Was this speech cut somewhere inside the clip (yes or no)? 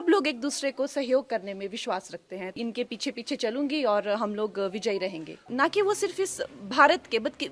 yes